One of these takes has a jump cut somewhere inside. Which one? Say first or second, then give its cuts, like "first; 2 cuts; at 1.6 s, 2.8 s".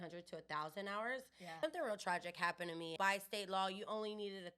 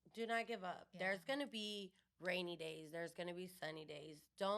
first; 2 cuts; at 1.4 s, 2.9 s